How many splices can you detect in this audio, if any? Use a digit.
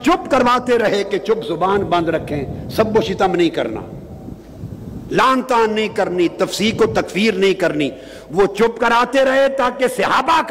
0